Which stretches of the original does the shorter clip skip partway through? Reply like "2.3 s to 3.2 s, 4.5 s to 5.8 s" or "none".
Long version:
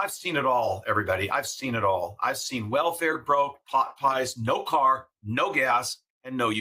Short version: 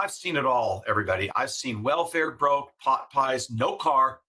1.3 s to 2.1 s